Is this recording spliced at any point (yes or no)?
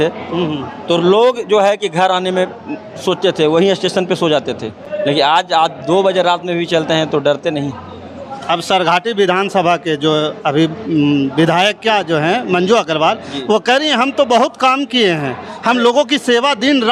no